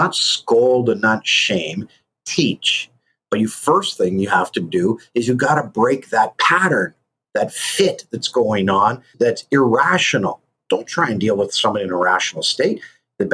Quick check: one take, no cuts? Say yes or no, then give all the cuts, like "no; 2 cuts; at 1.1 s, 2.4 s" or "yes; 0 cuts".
no; 2 cuts; at 9.1 s, 10.6 s